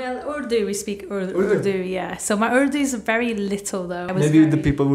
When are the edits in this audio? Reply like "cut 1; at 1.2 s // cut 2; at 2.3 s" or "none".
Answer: cut 1; at 4.0 s